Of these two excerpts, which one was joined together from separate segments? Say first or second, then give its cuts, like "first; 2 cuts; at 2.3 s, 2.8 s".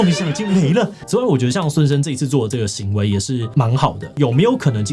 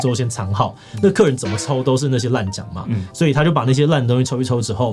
first; 2 cuts; at 1.0 s, 3.9 s